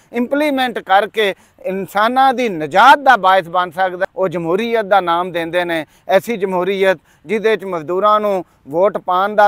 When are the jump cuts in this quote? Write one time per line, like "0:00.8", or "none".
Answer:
0:04.0